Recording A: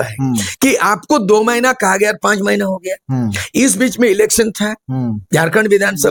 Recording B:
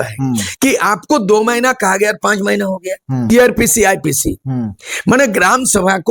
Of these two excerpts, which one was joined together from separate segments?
B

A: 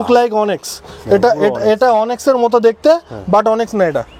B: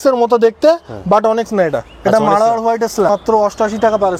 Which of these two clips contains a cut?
B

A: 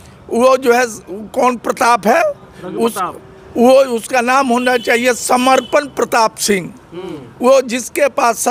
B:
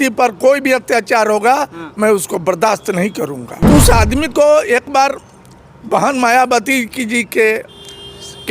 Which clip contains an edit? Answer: B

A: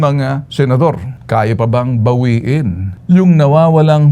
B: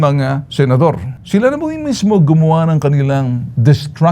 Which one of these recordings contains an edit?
A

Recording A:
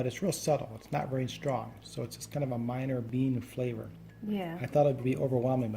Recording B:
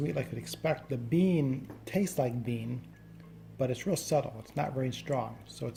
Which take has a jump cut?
A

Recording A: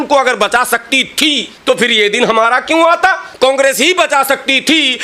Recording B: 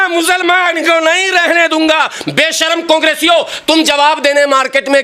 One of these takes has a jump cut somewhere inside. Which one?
A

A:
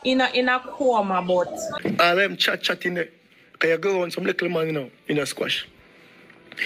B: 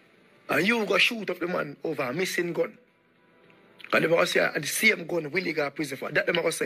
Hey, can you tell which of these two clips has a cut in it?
A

